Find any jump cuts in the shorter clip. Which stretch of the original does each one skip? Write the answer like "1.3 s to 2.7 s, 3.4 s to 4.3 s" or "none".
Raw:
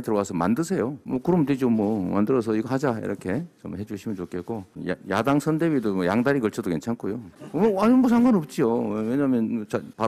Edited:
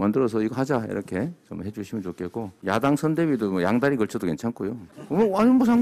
4.7 s to 5.0 s